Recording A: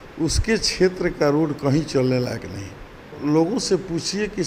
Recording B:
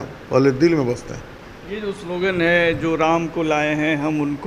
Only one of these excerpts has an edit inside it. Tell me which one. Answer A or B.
A